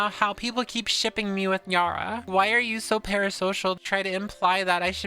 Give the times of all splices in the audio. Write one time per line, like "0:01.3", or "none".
0:02.3
0:03.8